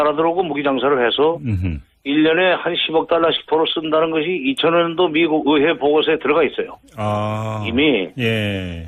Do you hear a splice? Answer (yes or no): yes